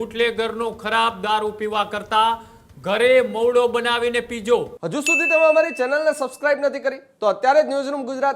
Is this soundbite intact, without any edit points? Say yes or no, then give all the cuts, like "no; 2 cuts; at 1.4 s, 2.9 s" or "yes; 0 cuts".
no; 1 cut; at 4.8 s